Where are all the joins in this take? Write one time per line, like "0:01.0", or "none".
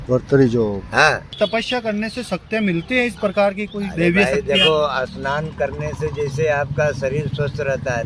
0:01.3